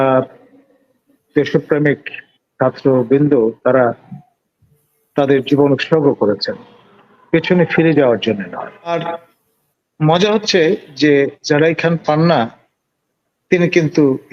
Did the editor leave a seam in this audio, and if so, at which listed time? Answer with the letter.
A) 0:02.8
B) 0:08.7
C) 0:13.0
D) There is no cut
B